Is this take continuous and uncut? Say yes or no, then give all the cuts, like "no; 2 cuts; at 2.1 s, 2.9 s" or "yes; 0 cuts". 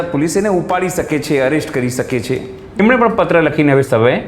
no; 1 cut; at 2.8 s